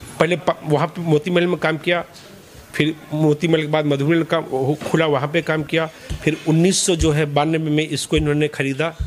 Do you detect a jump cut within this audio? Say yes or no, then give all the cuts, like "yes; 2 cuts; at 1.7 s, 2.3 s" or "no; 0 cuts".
no; 0 cuts